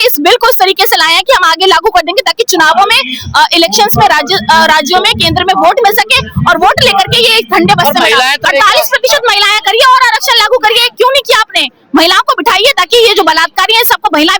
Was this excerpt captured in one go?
no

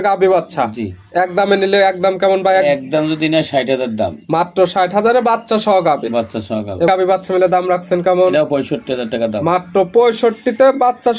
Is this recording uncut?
no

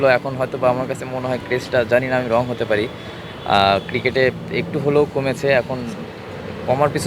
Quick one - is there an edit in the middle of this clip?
no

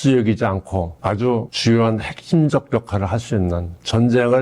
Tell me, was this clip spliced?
yes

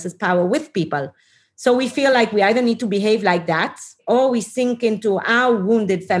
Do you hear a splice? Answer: no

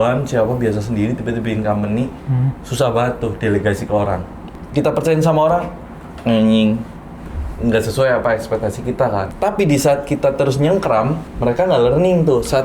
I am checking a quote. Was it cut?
yes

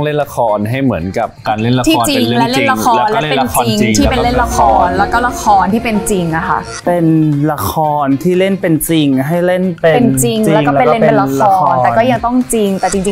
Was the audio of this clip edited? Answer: no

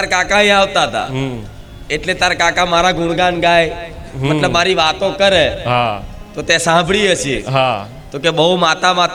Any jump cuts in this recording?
no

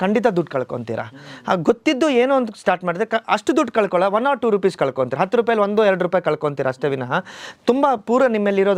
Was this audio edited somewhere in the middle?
no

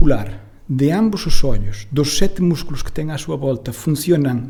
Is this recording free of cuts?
yes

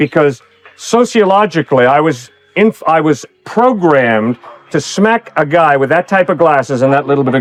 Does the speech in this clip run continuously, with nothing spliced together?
yes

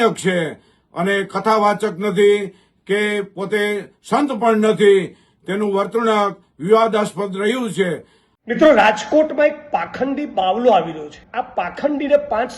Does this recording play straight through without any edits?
no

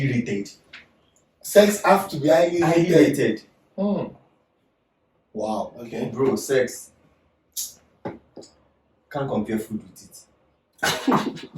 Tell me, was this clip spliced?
yes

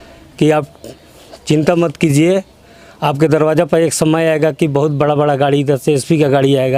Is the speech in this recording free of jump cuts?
yes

